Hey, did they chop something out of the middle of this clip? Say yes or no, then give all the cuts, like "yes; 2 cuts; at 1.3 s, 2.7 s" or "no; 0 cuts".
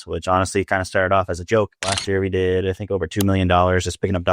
yes; 1 cut; at 1.9 s